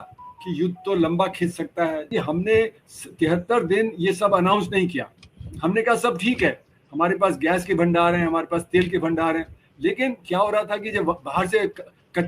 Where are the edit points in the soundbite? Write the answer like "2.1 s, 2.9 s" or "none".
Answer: 2.0 s